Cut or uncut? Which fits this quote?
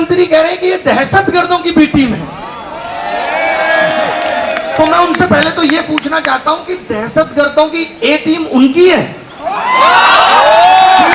uncut